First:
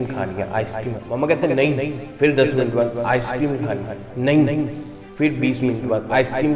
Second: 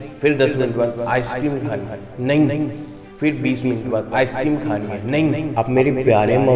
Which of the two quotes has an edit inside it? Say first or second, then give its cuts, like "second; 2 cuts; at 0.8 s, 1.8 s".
second; 1 cut; at 5.5 s